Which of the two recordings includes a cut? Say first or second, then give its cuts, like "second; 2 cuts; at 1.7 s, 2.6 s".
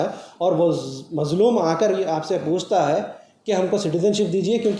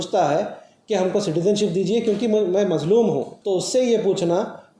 second; 1 cut; at 3.3 s